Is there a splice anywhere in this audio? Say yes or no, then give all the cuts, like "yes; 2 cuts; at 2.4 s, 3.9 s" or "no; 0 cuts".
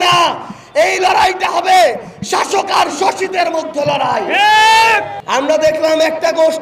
yes; 1 cut; at 5.2 s